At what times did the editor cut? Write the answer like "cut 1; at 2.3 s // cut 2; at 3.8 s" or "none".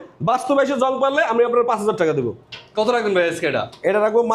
none